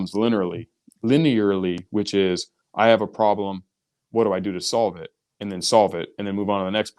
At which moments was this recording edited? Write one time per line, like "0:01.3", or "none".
none